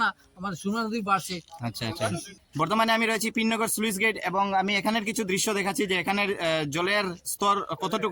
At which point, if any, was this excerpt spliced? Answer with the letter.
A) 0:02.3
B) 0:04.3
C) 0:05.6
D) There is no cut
A